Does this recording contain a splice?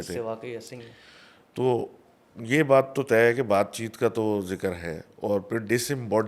no; 0 cuts

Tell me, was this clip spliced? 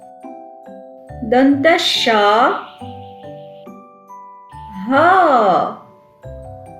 yes; 3 cuts; at 2.9 s, 4.7 s, 5.9 s

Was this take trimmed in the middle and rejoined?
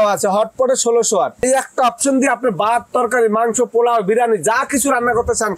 yes; 1 cut; at 1.5 s

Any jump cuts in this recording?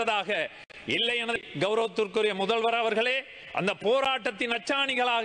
yes; 1 cut; at 1.5 s

